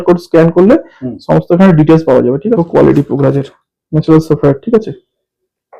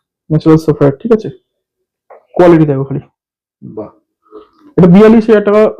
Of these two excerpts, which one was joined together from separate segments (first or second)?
first